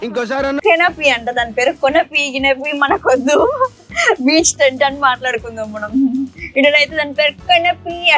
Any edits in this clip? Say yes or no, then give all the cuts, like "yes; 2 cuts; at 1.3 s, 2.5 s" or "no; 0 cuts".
no; 0 cuts